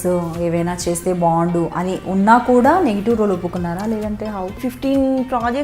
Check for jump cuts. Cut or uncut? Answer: cut